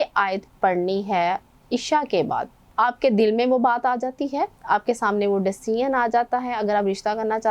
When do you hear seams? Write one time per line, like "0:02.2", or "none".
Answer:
0:02.6